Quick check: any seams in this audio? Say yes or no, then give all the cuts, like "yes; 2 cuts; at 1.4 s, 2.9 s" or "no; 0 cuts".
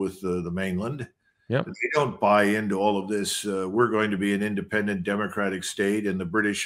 no; 0 cuts